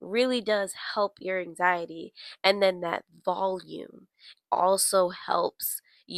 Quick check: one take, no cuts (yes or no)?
yes